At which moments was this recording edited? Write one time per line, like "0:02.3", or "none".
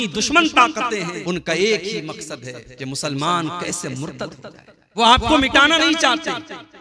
0:01.2
0:05.0

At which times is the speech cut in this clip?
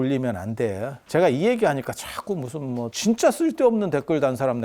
0:00.9
0:02.9

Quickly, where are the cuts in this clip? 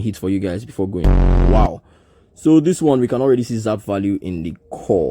0:01.4

